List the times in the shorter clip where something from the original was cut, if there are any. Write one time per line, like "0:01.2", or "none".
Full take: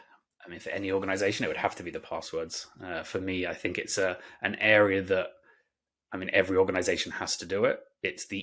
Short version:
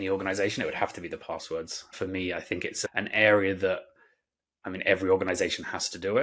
0:01.8
0:02.8

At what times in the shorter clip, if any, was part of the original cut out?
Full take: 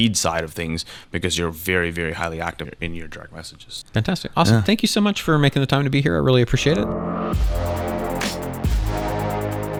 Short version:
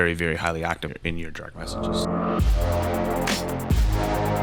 0:01.9

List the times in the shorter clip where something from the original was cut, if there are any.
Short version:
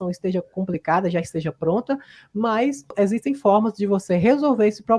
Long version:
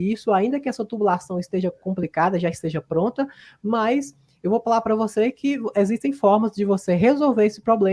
0:02.9

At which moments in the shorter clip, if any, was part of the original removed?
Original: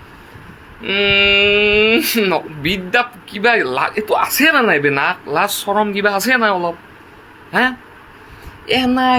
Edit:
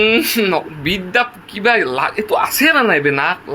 none

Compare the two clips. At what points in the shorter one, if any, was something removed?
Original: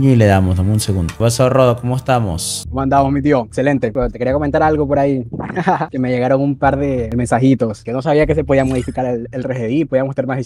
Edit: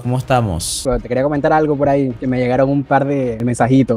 0:00.8
0:02.2

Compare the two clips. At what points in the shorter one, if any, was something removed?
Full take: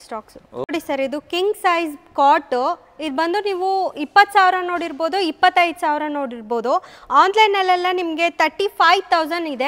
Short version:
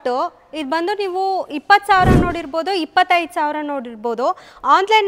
none

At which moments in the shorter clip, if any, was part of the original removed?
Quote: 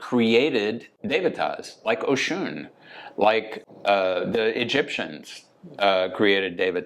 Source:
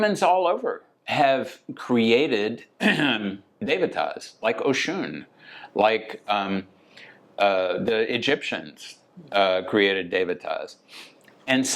0:00.9
0:03.6

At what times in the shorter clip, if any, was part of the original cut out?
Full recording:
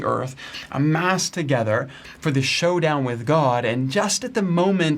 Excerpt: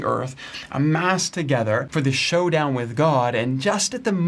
0:01.9

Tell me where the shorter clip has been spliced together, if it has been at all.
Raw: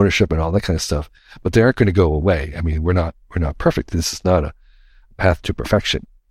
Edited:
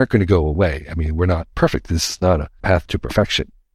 0:01.5
0:02.5

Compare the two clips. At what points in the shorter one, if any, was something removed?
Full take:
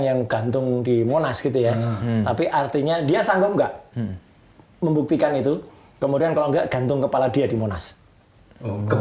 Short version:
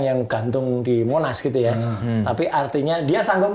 none

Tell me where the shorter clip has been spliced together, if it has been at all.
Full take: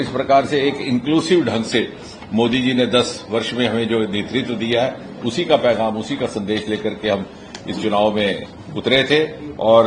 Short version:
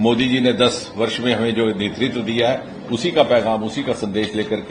none

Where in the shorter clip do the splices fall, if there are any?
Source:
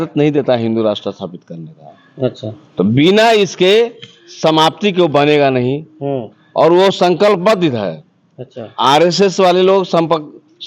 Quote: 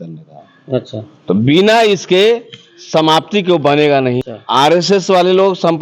0:04.3

